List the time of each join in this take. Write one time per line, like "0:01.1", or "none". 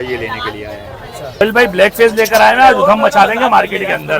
0:01.4